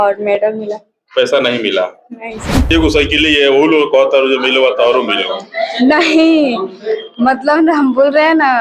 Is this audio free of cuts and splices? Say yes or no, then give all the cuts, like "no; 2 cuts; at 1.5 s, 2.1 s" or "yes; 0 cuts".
no; 1 cut; at 2.5 s